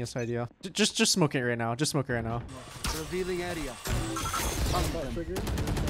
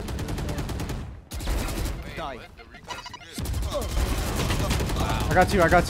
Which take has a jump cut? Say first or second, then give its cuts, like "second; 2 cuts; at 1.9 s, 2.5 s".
first; 1 cut; at 2.5 s